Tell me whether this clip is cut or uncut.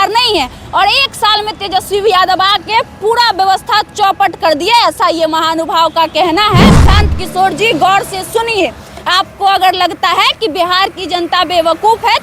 cut